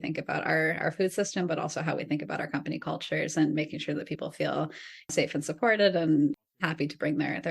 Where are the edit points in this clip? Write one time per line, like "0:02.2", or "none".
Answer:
0:05.1
0:06.3